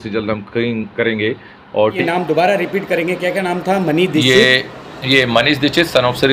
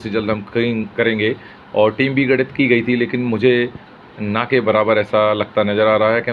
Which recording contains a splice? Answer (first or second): first